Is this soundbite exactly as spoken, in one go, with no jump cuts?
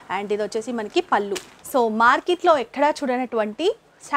no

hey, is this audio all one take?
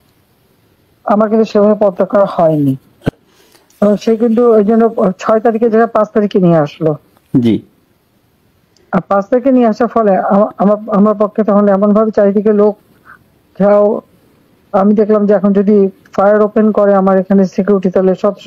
no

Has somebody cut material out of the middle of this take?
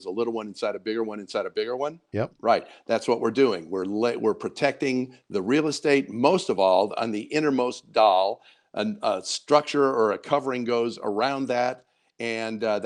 no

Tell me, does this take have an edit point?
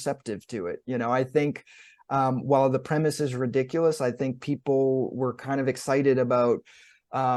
no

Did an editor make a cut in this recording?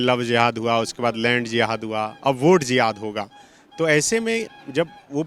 no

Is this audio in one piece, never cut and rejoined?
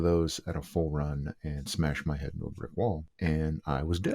no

